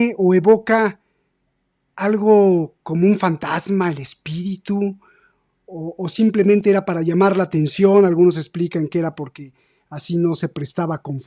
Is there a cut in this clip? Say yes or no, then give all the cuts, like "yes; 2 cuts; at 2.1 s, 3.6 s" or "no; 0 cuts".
no; 0 cuts